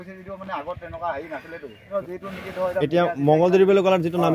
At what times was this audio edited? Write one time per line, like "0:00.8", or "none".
0:01.9

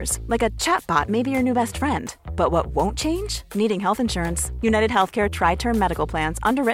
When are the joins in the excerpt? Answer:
none

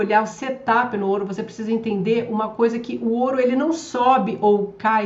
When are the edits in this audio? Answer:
none

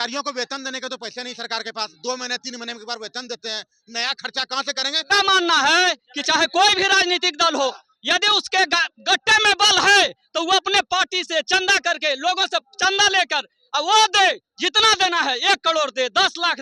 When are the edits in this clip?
0:05.1

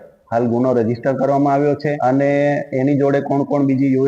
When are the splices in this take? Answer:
0:02.0

